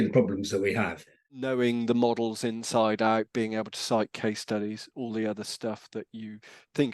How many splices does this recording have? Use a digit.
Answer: 1